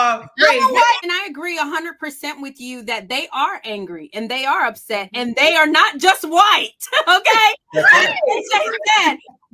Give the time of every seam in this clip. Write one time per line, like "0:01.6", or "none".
0:01.0